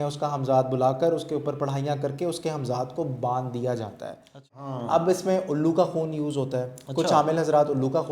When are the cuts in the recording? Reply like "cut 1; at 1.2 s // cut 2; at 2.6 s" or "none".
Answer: cut 1; at 4.6 s